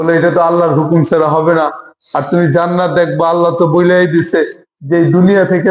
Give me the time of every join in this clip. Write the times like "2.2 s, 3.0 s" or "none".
none